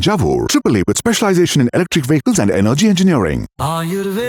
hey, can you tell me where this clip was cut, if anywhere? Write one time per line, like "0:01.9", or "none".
none